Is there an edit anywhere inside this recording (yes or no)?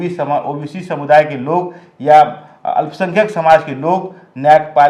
no